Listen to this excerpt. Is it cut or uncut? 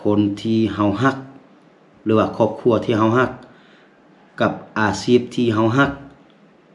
uncut